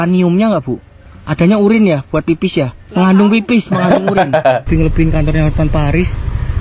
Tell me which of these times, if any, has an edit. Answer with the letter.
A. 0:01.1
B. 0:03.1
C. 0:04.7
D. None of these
C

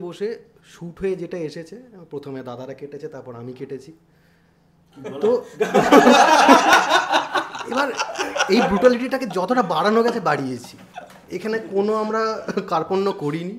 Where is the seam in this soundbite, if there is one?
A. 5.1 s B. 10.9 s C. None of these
C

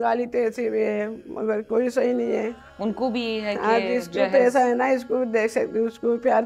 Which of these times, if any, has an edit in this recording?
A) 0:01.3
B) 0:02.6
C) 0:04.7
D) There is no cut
B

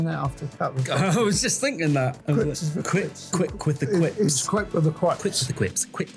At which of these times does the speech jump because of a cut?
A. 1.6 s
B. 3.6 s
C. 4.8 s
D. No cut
D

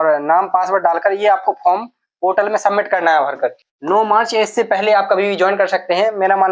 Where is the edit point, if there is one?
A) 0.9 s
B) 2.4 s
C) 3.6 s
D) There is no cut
C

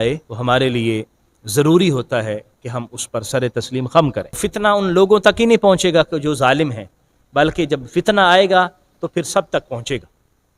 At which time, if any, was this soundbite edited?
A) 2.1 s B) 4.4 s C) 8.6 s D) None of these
B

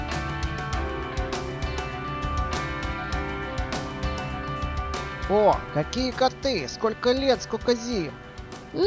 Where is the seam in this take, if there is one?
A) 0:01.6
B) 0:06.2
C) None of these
B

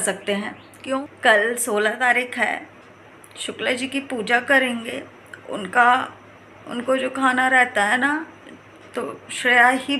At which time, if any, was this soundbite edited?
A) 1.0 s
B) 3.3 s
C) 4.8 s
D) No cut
A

